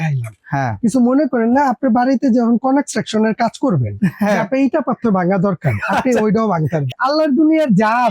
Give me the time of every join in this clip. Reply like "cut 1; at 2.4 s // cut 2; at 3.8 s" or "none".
cut 1; at 6.9 s